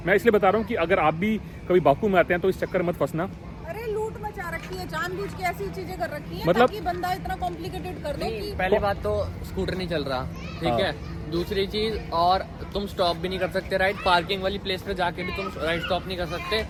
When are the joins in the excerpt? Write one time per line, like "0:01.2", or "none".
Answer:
none